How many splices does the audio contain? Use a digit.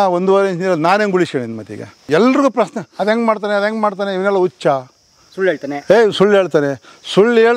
1